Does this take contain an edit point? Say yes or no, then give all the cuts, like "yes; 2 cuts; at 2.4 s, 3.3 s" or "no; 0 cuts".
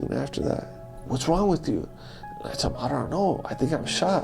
yes; 1 cut; at 1.0 s